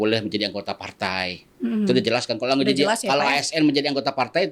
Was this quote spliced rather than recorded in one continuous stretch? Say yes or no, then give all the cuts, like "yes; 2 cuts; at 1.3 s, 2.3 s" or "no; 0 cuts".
no; 0 cuts